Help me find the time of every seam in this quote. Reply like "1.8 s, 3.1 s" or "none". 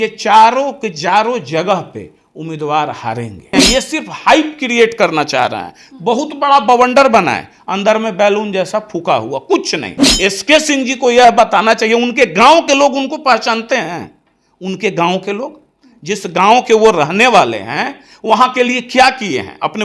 3.5 s, 10.0 s